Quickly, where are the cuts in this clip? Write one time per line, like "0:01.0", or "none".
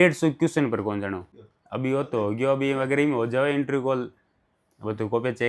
0:01.3